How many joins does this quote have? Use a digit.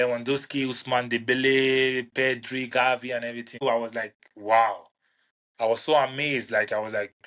1